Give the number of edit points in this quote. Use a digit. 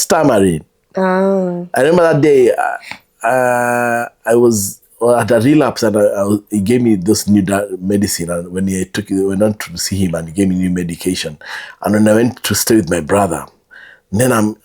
0